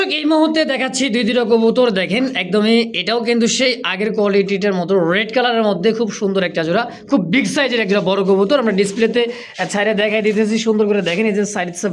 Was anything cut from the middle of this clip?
no; 0 cuts

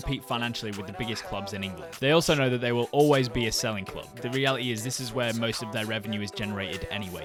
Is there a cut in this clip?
no; 0 cuts

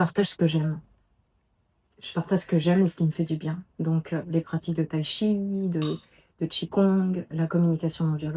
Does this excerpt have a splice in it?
no; 0 cuts

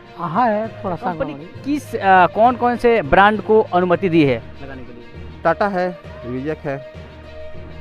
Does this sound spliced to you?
yes; 1 cut; at 1.5 s

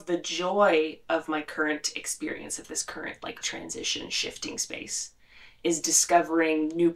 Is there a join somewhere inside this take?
no; 0 cuts

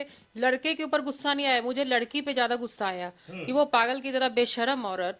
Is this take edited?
no; 0 cuts

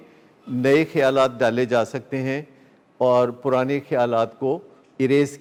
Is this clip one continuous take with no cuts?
yes; 0 cuts

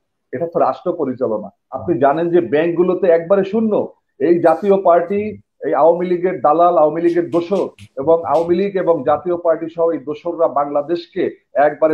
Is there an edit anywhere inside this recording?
yes; 1 cut; at 1.7 s

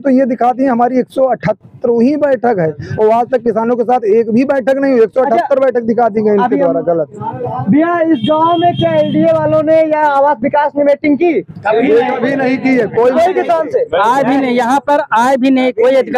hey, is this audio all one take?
yes; 0 cuts

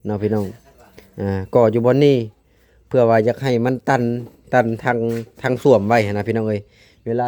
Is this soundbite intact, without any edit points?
yes; 0 cuts

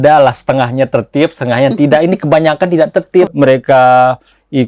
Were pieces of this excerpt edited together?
yes; 1 cut; at 3.3 s

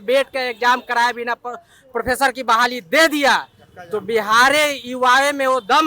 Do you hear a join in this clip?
no; 0 cuts

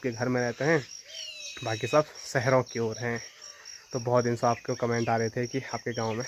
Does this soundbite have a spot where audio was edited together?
no; 0 cuts

